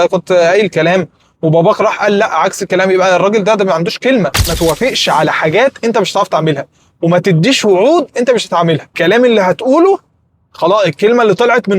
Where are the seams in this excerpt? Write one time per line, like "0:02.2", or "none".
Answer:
0:04.4
0:09.0